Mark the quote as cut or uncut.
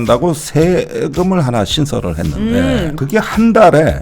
cut